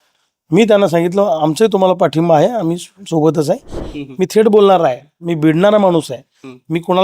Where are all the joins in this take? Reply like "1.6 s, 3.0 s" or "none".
3.8 s